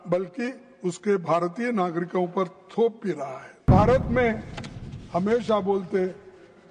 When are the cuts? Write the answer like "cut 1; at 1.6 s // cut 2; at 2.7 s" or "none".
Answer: cut 1; at 3.6 s